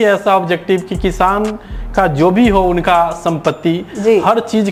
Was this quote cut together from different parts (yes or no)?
no